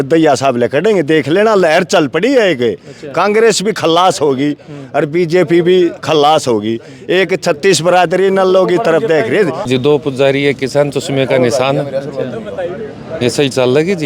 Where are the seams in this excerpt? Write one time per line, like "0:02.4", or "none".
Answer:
0:09.8